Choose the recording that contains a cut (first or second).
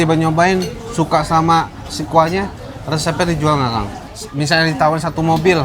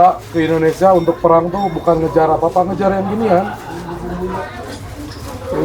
first